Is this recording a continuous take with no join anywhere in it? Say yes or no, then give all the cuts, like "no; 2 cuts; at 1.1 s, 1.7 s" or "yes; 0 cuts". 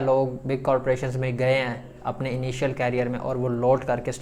yes; 0 cuts